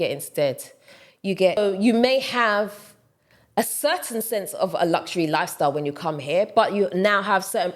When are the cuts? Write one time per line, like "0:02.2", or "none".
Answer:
0:01.6